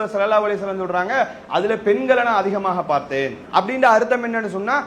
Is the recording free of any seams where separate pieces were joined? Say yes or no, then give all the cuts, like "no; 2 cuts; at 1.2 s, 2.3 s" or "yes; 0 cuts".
no; 1 cut; at 3.4 s